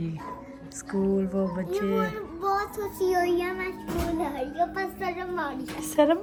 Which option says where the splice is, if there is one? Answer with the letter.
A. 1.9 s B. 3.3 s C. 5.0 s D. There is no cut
D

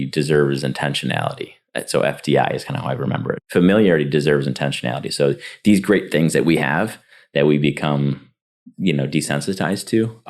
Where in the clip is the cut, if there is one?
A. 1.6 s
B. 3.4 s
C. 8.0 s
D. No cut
B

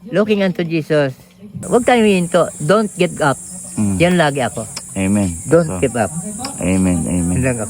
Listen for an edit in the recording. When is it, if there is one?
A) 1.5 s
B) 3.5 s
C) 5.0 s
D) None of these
A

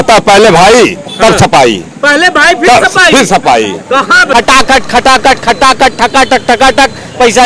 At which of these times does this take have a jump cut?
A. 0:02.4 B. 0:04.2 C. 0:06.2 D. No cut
B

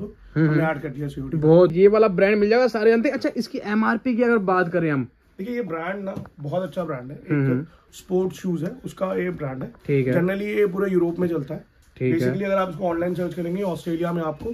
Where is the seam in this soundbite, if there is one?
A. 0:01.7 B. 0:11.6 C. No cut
A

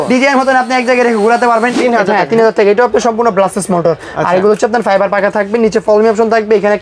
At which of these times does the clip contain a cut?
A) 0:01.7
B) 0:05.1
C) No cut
A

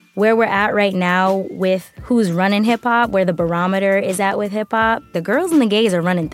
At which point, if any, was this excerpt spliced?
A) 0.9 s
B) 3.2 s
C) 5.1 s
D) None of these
C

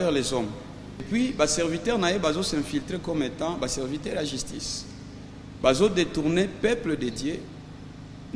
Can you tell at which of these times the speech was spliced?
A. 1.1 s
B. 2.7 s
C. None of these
A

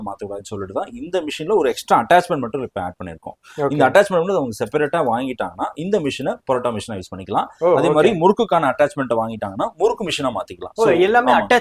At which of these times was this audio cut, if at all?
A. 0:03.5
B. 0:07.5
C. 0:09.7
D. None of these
D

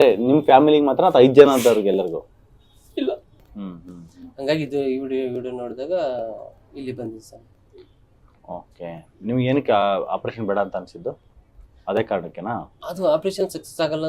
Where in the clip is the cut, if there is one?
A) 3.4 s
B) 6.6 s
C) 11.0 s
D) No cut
A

